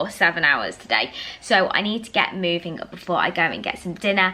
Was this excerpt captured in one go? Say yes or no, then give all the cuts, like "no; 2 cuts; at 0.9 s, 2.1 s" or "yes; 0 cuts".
yes; 0 cuts